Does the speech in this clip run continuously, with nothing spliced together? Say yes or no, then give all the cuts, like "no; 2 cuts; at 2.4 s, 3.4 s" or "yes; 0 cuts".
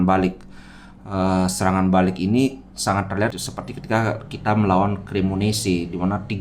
no; 1 cut; at 3.5 s